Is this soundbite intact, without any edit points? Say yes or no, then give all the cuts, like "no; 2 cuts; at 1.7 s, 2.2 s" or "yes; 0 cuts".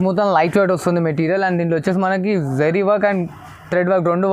yes; 0 cuts